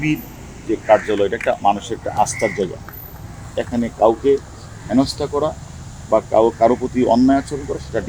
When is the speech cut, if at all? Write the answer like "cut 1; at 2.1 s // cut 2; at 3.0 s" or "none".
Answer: none